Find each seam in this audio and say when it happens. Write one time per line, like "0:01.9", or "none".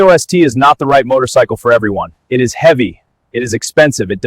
none